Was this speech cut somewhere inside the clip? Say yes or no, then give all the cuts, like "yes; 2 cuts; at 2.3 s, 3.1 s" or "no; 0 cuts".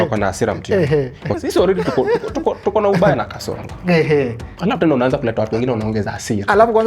yes; 1 cut; at 1.4 s